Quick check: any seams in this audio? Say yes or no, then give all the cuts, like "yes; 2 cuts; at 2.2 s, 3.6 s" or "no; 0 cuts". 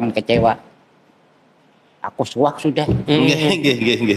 no; 0 cuts